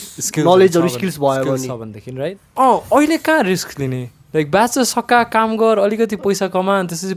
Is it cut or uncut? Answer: cut